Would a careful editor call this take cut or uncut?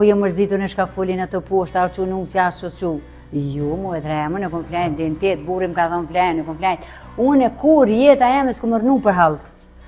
uncut